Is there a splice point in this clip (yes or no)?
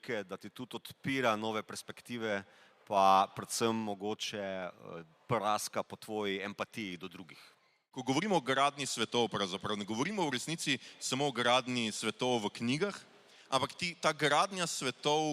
yes